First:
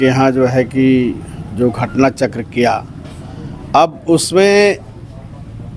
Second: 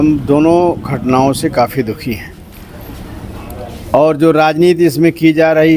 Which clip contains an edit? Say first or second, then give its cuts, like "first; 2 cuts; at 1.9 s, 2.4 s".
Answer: second; 1 cut; at 2.6 s